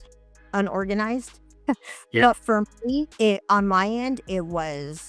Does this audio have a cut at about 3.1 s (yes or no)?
yes